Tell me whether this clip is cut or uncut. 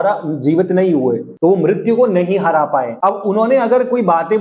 cut